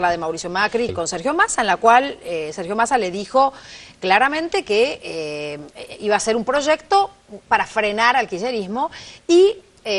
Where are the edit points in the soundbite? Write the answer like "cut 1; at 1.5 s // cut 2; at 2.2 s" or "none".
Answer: cut 1; at 0.9 s